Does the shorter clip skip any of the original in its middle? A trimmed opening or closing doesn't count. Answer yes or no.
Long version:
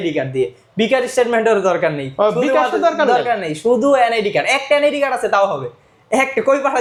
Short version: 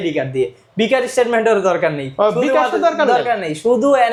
no